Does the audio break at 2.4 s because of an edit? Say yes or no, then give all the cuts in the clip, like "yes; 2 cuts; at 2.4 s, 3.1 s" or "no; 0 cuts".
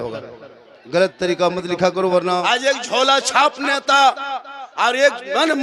yes; 1 cut; at 2.4 s